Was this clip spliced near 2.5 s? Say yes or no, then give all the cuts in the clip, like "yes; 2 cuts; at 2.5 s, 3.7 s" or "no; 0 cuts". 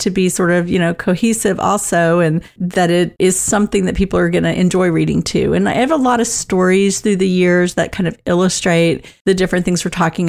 no; 1 cut; at 9.1 s